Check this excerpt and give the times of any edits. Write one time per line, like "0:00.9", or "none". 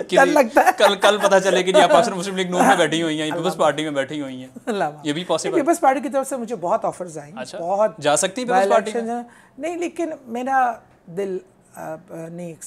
none